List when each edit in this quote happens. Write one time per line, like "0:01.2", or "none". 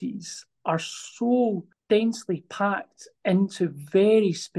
0:01.7